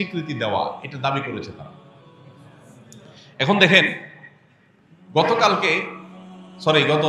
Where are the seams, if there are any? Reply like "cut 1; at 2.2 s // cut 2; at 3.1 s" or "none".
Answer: none